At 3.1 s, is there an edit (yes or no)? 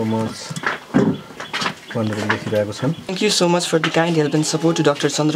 yes